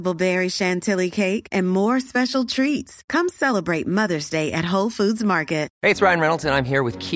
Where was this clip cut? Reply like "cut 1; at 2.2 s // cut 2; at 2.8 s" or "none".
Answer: cut 1; at 5.7 s